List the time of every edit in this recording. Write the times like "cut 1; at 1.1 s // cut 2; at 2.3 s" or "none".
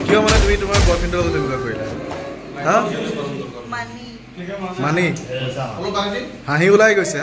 none